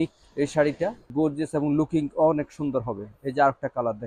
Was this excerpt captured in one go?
no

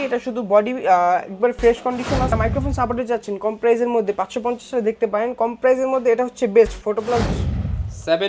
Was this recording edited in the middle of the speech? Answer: yes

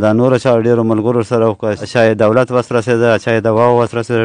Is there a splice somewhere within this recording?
yes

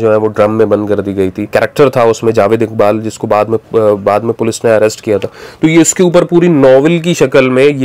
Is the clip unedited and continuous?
no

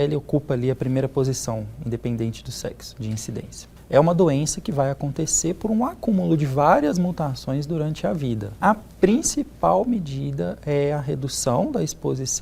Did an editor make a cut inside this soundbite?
yes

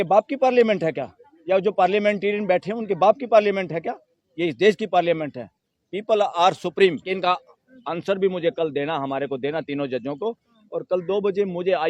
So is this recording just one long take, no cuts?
no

